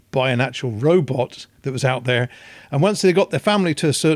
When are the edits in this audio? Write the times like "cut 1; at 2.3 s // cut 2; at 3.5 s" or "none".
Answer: none